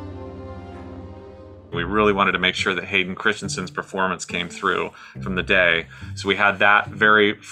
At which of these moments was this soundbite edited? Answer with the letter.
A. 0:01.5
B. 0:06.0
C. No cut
A